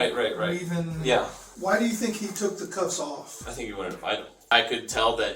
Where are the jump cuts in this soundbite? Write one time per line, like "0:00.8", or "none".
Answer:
0:01.4
0:04.5